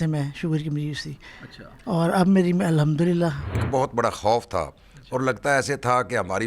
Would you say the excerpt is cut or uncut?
cut